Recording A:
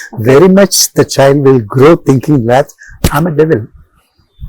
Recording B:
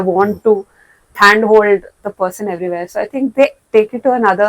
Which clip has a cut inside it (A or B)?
B